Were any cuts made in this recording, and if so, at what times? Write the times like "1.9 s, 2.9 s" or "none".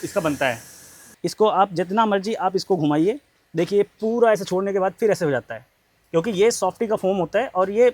1.1 s